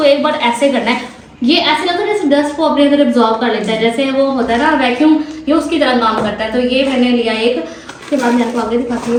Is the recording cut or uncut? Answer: uncut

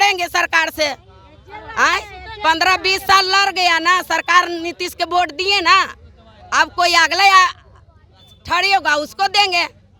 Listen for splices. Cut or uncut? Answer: uncut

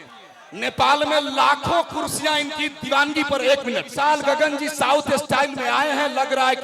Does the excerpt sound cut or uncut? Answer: cut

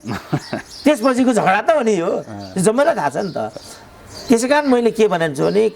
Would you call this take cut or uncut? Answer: uncut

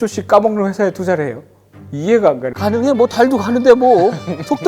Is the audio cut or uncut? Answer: cut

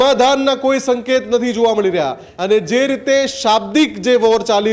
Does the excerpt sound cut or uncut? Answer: cut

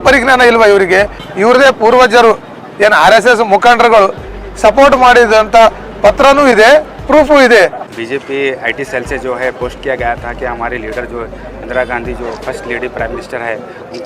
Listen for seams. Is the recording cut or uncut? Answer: cut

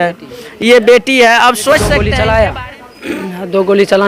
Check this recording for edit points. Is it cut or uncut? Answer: cut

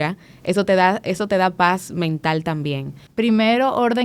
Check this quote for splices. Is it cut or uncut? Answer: cut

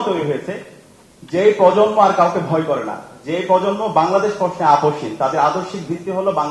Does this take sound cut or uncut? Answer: uncut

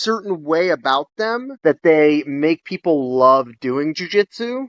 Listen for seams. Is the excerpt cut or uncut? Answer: uncut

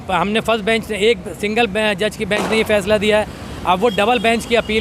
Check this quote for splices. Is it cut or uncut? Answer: uncut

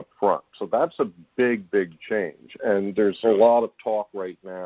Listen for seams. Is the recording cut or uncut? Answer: uncut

